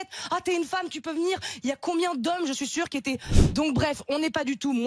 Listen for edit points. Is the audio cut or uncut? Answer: cut